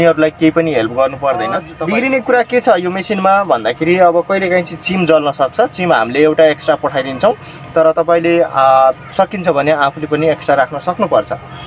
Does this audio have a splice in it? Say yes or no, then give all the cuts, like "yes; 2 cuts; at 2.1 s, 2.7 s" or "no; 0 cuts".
yes; 1 cut; at 1.7 s